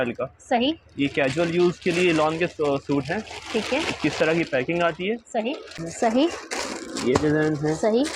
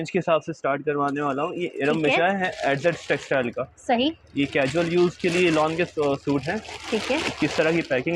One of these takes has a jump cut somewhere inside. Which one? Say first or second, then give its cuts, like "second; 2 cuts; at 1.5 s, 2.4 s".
first; 1 cut; at 5.8 s